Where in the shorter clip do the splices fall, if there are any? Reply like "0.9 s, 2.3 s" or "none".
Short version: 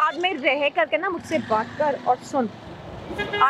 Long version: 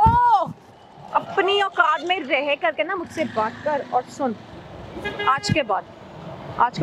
none